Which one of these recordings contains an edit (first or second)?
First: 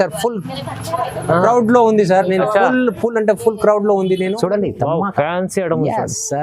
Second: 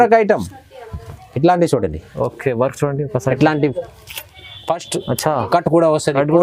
first